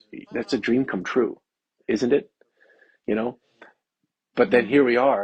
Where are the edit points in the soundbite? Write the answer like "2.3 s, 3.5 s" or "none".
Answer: none